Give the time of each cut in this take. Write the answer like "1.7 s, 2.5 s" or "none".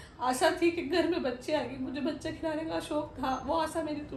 none